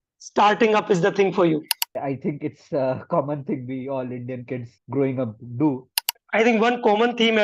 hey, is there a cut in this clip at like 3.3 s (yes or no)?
no